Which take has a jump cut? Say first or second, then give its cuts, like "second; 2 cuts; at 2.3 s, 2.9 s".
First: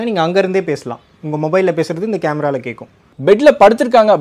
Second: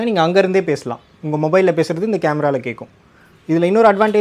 first; 1 cut; at 3.1 s